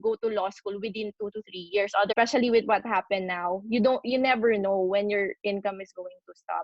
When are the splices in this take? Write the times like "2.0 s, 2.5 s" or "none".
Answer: 2.1 s